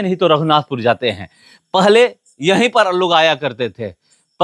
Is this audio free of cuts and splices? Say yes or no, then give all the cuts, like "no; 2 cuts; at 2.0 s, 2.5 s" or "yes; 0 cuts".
yes; 0 cuts